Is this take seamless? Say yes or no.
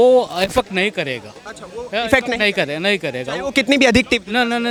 yes